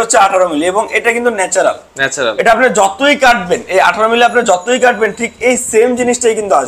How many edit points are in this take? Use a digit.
0